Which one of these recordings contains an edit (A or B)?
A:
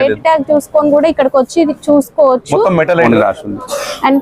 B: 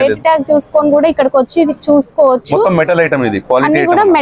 A